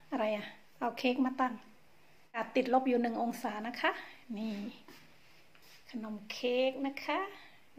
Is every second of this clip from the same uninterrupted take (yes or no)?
no